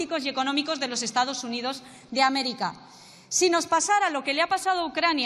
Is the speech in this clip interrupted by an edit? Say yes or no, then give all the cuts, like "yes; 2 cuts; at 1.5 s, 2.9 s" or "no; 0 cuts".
no; 0 cuts